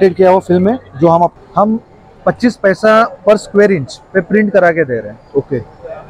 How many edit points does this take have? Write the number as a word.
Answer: one